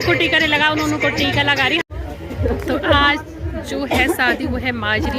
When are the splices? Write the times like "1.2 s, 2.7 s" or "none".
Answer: 1.8 s